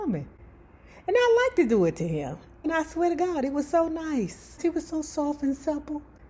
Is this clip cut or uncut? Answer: cut